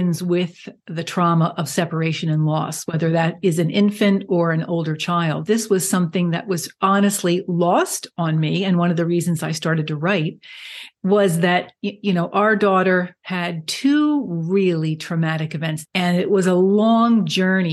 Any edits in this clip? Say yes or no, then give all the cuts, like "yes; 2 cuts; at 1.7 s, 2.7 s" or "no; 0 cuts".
yes; 2 cuts; at 5.4 s, 15.8 s